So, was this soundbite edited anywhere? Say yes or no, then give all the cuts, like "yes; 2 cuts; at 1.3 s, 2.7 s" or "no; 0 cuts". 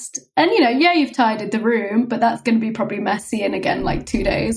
no; 0 cuts